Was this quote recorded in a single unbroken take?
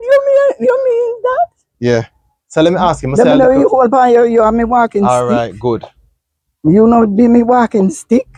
yes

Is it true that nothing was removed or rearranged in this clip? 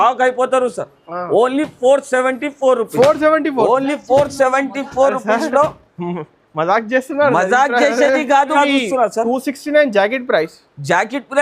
no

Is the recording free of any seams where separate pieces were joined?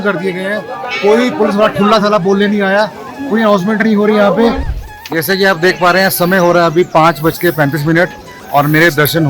no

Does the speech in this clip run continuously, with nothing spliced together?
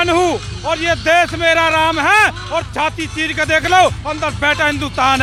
yes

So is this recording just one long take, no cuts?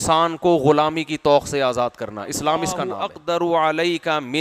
no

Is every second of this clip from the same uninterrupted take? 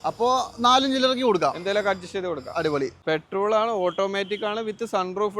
no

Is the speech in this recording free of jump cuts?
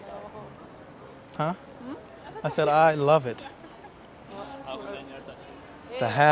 yes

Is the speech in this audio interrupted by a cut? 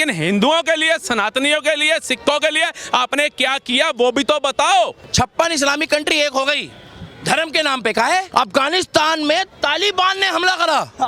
yes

